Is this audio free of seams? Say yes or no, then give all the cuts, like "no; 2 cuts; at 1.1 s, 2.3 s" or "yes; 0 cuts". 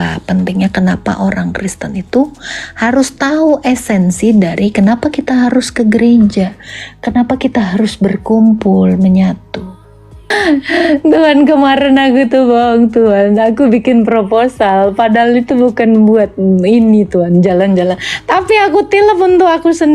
no; 1 cut; at 10.3 s